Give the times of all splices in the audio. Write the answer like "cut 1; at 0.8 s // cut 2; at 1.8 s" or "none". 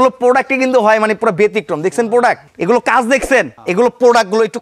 cut 1; at 2.5 s // cut 2; at 3.6 s